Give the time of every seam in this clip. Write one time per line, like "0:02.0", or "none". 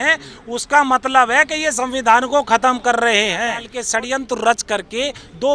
0:03.8